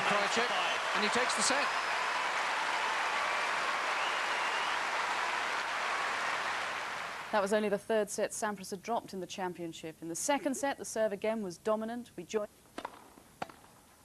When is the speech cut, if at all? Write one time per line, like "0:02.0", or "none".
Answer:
0:07.0